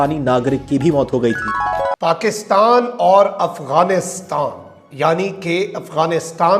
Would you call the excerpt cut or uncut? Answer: cut